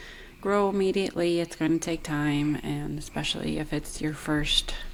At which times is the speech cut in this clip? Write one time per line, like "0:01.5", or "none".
none